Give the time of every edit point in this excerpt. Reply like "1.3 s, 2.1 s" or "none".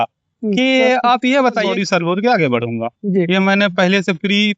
1.6 s